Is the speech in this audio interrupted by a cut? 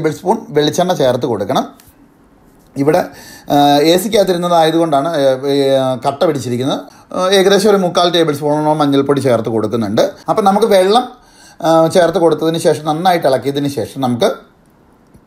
yes; 2 cuts; at 6.9 s, 10.2 s

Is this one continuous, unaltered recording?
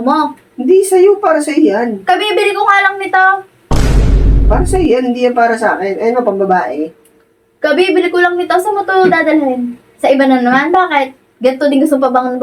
yes; 0 cuts

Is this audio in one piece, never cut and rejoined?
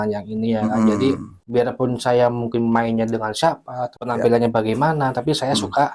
yes; 0 cuts

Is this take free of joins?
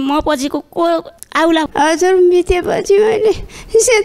no; 1 cut; at 1.7 s

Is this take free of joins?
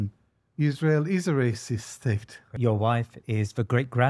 no; 1 cut; at 2.5 s

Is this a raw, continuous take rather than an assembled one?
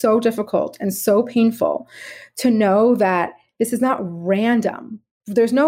yes; 0 cuts

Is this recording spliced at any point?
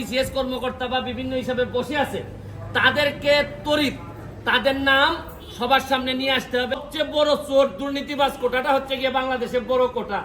yes; 1 cut; at 6.8 s

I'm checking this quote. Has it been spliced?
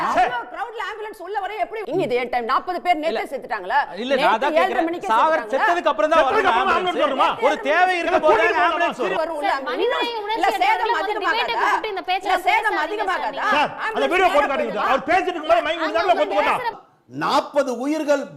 yes; 3 cuts; at 1.8 s, 9.2 s, 16.8 s

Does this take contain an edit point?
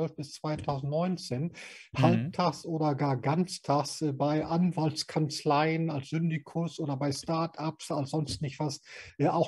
no; 0 cuts

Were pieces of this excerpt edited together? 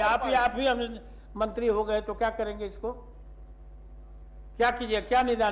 no; 0 cuts

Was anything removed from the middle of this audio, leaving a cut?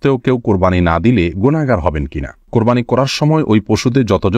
yes; 1 cut; at 2.5 s

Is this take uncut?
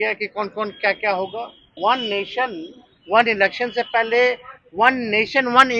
no; 1 cut; at 1.6 s

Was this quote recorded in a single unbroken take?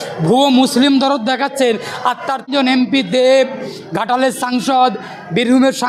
no; 1 cut; at 2.6 s

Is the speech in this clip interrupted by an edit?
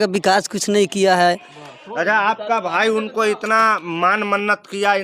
no; 0 cuts

